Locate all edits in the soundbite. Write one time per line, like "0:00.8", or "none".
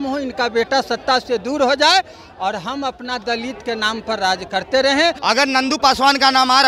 0:05.2